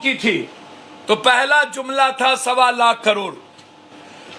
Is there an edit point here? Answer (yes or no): no